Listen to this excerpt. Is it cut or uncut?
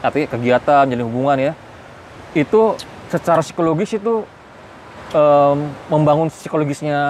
uncut